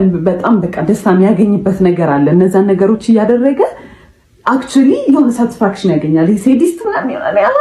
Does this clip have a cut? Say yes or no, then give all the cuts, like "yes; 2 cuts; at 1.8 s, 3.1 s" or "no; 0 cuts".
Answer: no; 0 cuts